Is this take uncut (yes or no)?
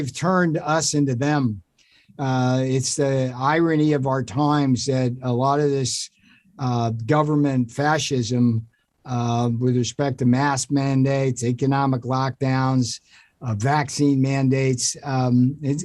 yes